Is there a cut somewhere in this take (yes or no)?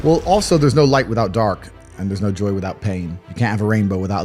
yes